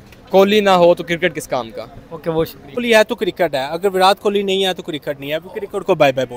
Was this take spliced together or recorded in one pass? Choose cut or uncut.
cut